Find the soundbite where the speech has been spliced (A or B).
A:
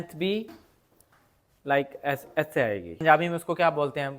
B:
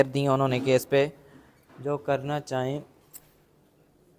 A